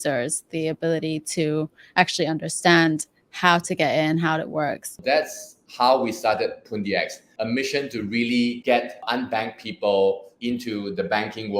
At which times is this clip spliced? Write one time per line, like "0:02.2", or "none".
0:05.1
0:07.2
0:09.0
0:10.3